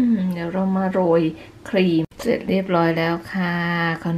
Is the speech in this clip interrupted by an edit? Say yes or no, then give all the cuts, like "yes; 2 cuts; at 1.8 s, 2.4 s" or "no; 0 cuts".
yes; 1 cut; at 2.2 s